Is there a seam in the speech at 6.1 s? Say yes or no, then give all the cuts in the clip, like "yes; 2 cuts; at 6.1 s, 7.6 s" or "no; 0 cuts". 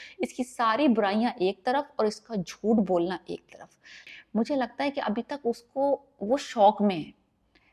no; 1 cut; at 4.0 s